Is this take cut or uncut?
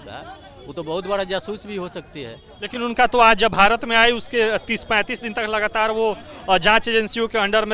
uncut